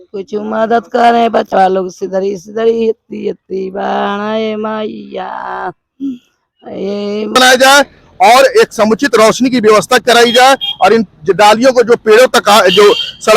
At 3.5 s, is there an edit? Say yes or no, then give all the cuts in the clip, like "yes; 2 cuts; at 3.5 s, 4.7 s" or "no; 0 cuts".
no; 1 cut; at 7.4 s